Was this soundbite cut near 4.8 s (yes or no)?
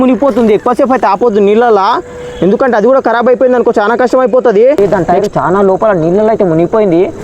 yes